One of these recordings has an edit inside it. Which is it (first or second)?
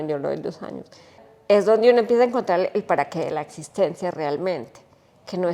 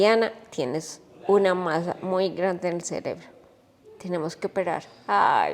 first